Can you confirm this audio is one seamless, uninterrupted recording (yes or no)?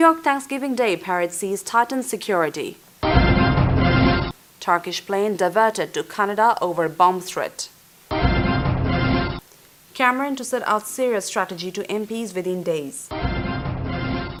yes